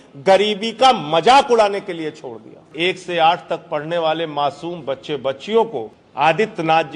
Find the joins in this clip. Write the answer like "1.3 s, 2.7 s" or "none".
2.6 s, 6.0 s

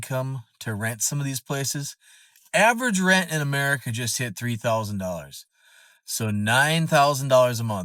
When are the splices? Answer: none

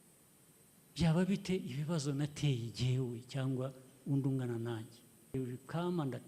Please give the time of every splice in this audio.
5.3 s

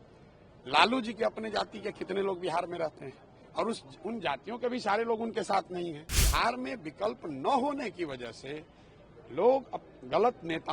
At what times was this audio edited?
6.1 s

